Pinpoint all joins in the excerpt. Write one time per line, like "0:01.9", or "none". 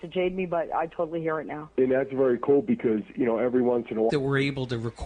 none